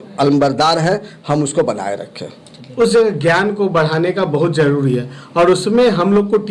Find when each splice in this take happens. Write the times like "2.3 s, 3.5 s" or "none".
2.6 s